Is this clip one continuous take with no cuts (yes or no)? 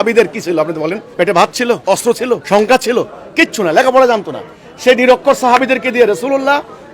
no